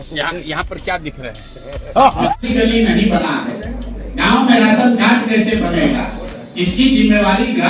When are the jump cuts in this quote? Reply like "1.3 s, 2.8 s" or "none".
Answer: 2.5 s